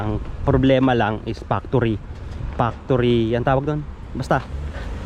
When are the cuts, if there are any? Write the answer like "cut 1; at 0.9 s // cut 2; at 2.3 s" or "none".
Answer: none

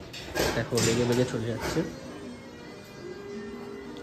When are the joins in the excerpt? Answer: none

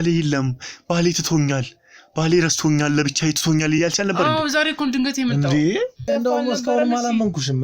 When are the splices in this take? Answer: cut 1; at 6.1 s

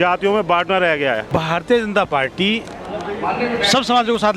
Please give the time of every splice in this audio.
cut 1; at 1.2 s

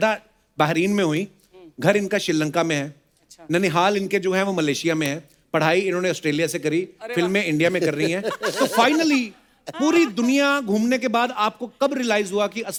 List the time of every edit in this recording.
none

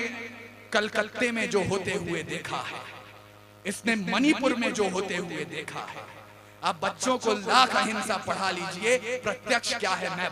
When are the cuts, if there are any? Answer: none

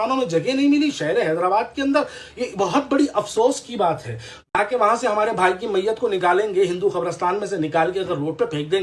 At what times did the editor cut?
cut 1; at 4.6 s

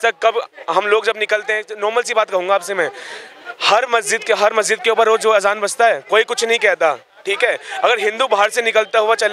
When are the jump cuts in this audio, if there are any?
none

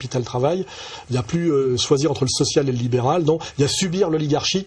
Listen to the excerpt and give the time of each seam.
cut 1; at 1.7 s

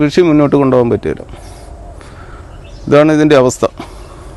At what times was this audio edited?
none

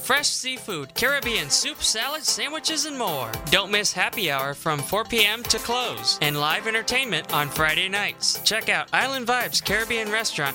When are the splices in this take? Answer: none

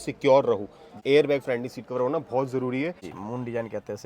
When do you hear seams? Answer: cut 1; at 0.9 s // cut 2; at 3.1 s

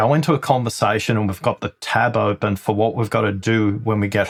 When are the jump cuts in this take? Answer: none

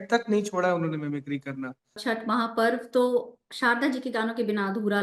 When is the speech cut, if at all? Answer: cut 1; at 2.0 s

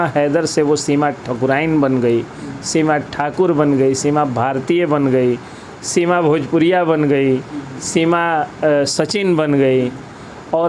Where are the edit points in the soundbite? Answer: none

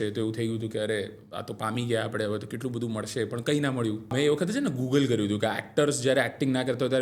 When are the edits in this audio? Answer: cut 1; at 4.1 s

